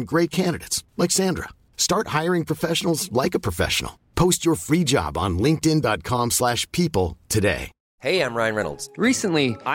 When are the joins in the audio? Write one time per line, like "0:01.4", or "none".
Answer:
0:07.8